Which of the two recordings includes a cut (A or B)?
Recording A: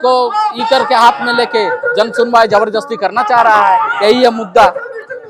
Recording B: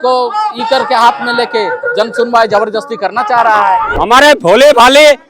B